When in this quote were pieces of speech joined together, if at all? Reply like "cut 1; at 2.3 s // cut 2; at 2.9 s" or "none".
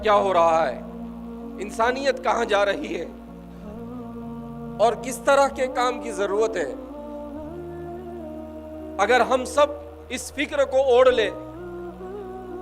cut 1; at 3.1 s // cut 2; at 4.5 s // cut 3; at 6.8 s // cut 4; at 9.0 s